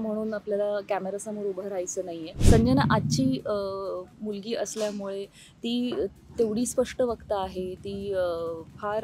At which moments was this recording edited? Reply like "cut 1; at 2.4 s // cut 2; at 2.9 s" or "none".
cut 1; at 2.3 s